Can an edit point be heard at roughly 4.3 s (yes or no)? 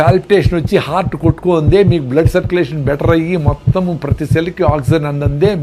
no